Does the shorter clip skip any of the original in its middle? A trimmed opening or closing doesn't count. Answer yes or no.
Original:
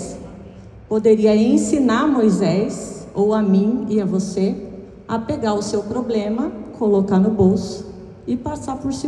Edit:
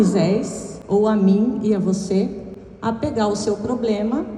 no